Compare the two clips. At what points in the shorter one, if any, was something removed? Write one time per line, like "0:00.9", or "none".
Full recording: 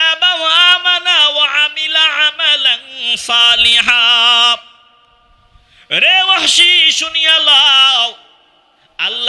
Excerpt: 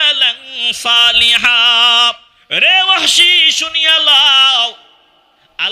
0:02.3